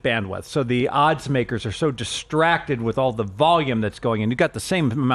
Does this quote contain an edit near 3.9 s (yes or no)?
no